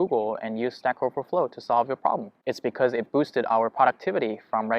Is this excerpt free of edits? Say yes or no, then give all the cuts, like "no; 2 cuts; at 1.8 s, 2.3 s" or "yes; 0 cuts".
yes; 0 cuts